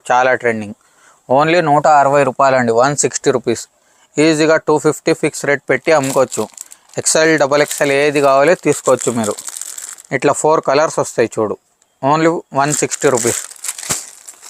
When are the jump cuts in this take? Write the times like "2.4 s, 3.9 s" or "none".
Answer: none